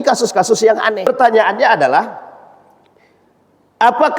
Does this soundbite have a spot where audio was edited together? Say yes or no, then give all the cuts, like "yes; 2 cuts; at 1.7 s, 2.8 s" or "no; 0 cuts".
yes; 1 cut; at 1.1 s